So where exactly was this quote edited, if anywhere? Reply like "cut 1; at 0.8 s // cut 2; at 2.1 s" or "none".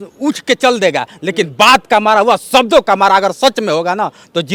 none